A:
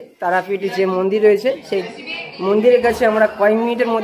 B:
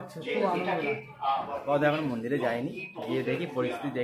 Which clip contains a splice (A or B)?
B